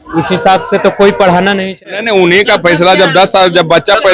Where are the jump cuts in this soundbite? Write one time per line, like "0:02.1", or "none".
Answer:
0:01.8